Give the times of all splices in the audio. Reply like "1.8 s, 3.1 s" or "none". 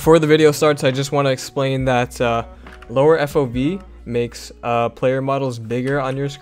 none